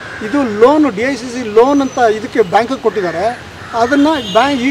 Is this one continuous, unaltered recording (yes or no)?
yes